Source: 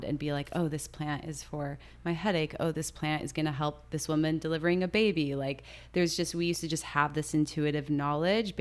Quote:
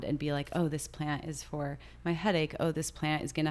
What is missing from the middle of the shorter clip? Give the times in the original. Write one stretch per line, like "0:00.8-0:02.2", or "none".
none